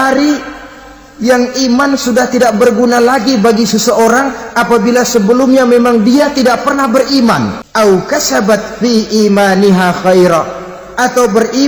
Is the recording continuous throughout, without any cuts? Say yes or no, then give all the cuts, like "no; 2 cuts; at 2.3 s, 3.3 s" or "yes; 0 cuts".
no; 1 cut; at 7.6 s